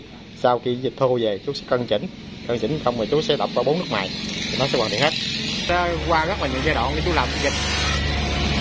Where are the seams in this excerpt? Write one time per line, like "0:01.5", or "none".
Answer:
0:05.7

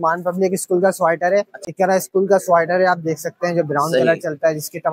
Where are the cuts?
0:01.5

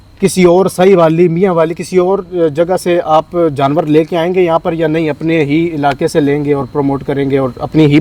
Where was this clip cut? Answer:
none

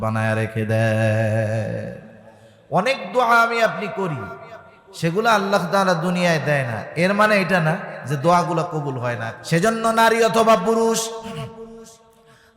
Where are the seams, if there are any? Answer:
0:09.3

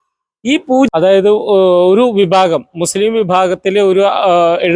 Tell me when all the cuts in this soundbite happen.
0:00.9

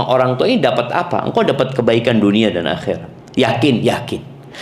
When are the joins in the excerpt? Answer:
0:03.1

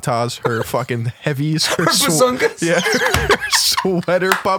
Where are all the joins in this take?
none

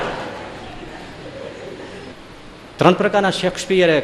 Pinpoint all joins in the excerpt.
0:02.1

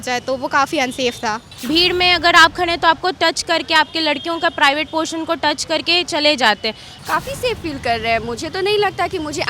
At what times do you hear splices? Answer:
0:01.5
0:06.9

